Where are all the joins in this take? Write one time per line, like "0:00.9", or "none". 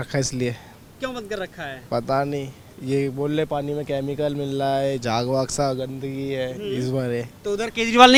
none